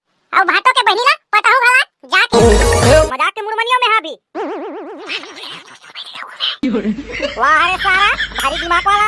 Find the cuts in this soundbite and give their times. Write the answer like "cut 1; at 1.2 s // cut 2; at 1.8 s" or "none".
cut 1; at 3.0 s